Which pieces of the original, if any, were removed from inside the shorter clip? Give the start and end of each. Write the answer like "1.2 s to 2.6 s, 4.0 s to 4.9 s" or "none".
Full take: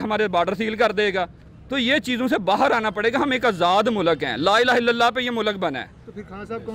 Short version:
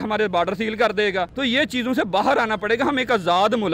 1.3 s to 1.7 s